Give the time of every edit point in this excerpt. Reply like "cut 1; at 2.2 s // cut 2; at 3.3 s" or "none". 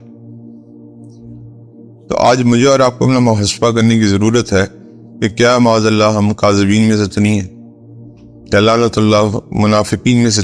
none

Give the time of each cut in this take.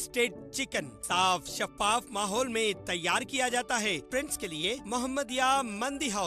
cut 1; at 4.0 s

